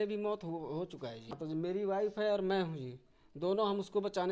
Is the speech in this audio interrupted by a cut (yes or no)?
yes